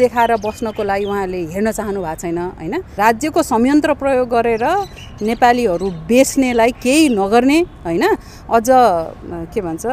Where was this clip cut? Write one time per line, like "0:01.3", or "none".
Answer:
0:02.9